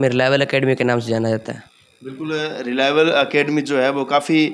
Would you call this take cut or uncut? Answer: uncut